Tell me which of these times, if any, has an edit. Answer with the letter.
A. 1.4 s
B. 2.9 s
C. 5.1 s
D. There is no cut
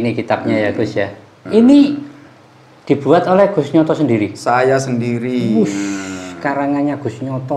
A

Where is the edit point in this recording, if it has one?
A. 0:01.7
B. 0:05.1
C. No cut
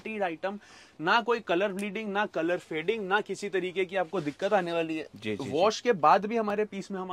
C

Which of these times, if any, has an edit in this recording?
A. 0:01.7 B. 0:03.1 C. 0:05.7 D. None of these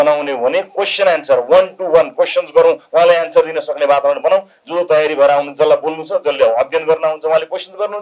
D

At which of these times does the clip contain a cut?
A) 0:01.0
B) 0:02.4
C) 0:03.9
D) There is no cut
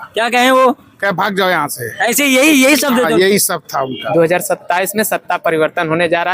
C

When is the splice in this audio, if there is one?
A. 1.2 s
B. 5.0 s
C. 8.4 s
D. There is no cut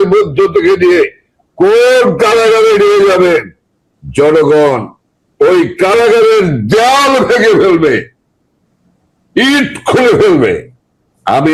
D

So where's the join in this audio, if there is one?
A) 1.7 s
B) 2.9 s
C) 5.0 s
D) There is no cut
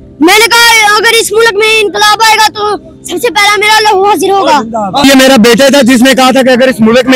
C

